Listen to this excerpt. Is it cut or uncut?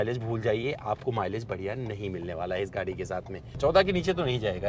cut